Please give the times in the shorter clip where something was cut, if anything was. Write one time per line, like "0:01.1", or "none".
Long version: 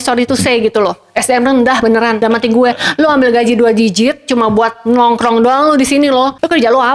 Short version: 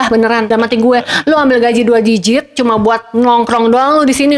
none